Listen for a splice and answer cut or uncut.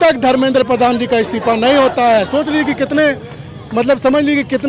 uncut